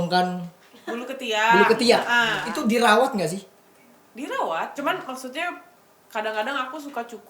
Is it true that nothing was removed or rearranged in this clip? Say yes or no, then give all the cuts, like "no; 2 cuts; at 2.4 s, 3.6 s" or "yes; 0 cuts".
no; 2 cuts; at 2.4 s, 4.7 s